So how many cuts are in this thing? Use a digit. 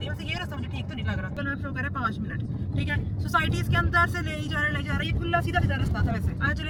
0